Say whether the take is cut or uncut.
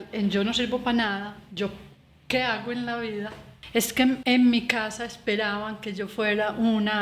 cut